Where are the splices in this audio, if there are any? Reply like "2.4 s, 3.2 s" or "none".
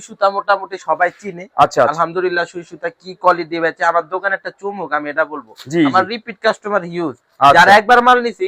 none